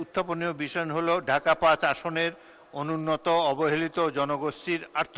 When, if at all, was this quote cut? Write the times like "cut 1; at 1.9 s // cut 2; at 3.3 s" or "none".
none